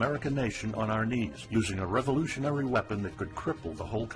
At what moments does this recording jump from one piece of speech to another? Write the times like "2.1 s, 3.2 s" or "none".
none